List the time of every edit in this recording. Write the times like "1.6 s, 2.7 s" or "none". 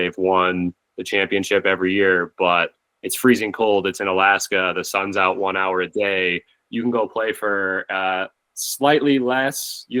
none

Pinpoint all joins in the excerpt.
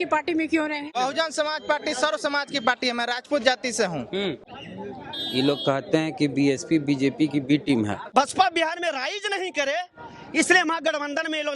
0.9 s, 4.4 s, 8.0 s

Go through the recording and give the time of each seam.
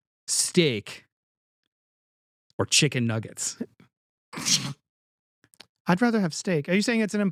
none

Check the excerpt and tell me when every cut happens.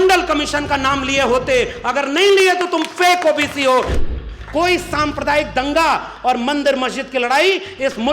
4.0 s

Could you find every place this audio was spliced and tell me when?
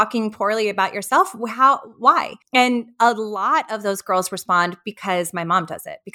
2.3 s

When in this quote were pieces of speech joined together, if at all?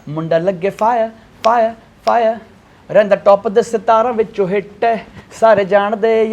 none

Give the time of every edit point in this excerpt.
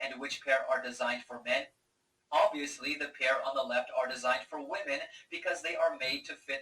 1.7 s

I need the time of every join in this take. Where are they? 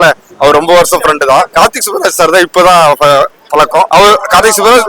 1.5 s, 3.9 s

